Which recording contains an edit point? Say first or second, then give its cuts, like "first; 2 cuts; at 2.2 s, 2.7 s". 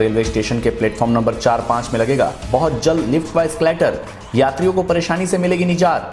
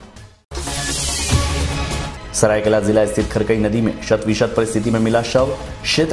second; 1 cut; at 2.2 s